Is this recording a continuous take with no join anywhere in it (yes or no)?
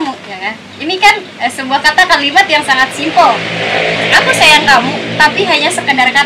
yes